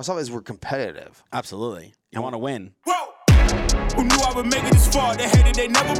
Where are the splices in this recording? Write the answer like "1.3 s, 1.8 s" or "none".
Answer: 2.7 s